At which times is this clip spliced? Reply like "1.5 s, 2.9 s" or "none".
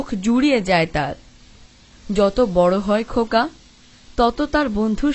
1.9 s